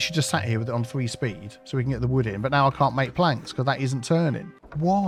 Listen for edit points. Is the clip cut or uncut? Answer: uncut